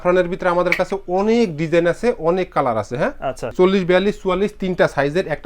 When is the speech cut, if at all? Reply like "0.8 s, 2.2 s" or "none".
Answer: 3.5 s